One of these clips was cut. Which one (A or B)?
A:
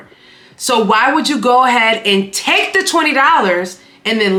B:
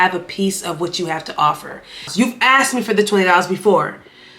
B